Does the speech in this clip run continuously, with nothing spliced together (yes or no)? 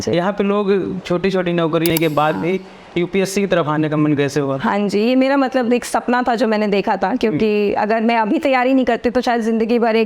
no